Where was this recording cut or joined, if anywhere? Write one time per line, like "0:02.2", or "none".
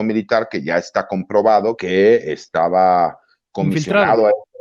0:01.8